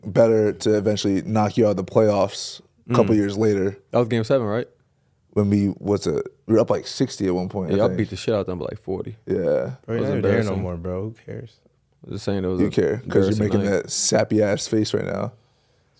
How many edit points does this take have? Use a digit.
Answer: 0